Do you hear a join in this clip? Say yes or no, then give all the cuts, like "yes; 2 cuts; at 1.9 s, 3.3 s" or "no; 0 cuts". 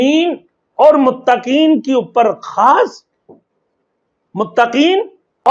no; 0 cuts